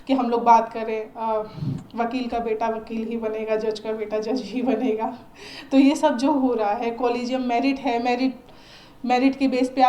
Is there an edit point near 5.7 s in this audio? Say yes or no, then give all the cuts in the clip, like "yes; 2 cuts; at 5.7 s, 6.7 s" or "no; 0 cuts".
no; 1 cut; at 1.1 s